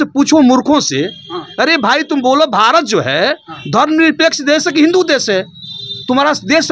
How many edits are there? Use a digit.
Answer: 0